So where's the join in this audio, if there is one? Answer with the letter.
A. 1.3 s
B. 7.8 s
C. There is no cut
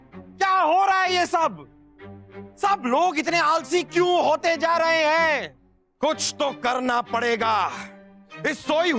C